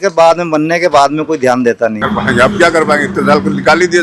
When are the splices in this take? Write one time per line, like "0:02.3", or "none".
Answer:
0:02.0